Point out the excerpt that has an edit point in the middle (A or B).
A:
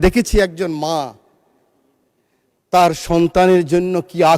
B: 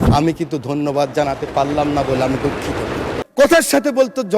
B